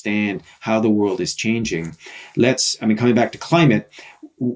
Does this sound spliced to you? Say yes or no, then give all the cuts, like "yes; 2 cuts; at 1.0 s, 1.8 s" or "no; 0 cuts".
no; 0 cuts